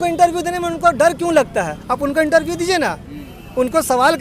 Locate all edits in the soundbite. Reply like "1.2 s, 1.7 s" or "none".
none